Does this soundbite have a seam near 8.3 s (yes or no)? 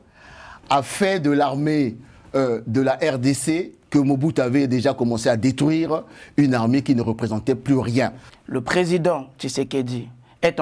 yes